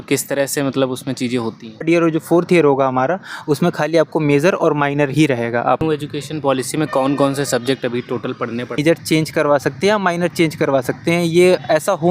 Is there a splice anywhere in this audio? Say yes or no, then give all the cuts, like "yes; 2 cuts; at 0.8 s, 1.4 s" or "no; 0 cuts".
yes; 3 cuts; at 1.8 s, 5.8 s, 8.8 s